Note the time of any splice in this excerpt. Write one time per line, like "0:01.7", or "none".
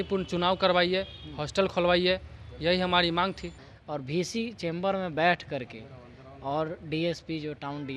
0:03.7